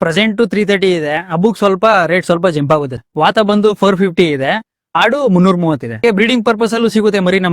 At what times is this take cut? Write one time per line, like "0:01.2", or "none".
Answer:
0:03.0
0:06.0